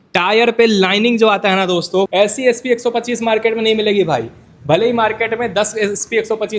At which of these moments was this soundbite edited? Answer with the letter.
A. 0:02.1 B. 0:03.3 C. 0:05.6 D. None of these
A